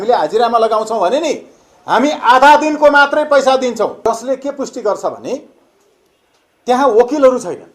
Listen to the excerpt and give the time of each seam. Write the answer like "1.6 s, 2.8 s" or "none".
4.0 s

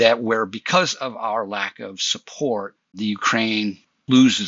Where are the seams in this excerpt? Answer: 2.8 s

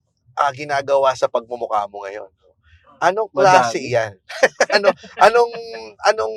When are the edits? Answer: none

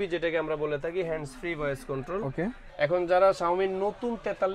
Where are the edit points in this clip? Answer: 2.7 s

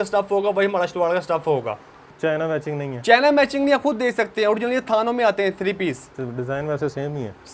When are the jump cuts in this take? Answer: 2.1 s

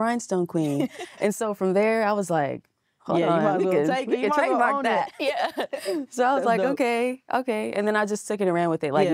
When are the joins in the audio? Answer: none

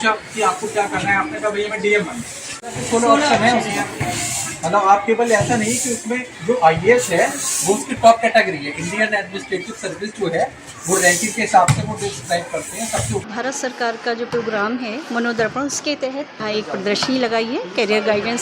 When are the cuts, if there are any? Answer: 2.5 s, 13.2 s, 16.4 s

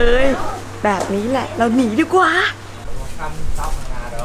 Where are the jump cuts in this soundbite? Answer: 2.6 s

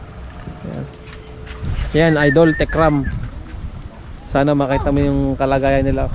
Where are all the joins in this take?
1.7 s

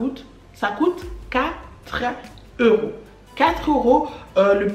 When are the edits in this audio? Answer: none

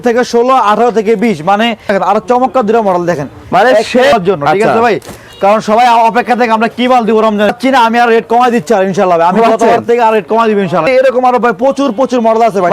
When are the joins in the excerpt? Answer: 1.9 s, 4.1 s, 7.6 s, 10.8 s

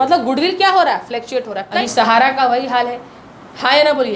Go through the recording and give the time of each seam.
1.7 s

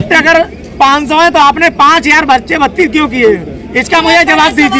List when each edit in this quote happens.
none

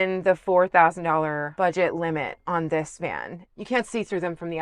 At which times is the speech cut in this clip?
1.5 s, 3.4 s

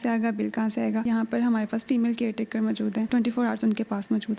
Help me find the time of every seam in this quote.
1.0 s, 3.1 s

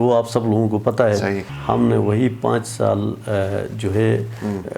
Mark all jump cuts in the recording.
1.5 s

